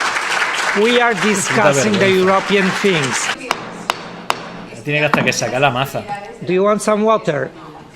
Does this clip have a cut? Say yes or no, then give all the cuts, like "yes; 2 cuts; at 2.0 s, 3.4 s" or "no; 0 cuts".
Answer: yes; 1 cut; at 3.4 s